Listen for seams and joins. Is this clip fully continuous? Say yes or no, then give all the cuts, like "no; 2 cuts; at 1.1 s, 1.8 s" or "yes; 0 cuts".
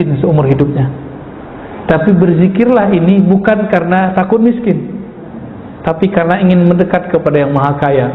yes; 0 cuts